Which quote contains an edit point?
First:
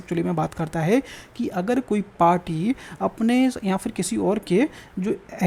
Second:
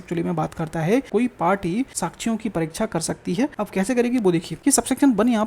second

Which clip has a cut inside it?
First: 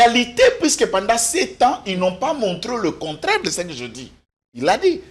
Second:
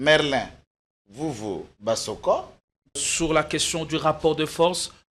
second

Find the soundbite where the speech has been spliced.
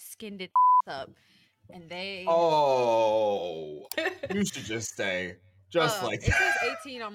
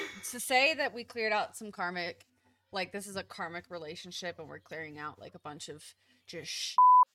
first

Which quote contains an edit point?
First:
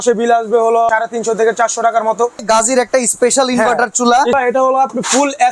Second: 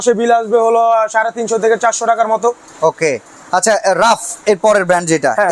first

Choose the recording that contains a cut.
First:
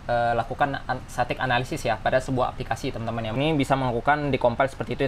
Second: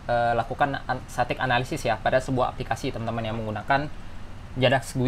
first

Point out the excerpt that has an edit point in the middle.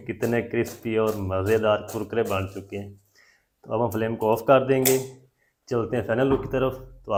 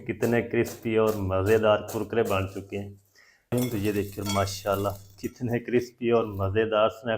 second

